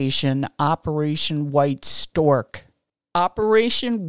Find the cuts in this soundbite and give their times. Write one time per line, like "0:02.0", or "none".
0:02.7